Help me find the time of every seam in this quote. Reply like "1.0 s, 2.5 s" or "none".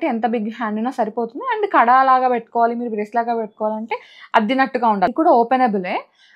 5.1 s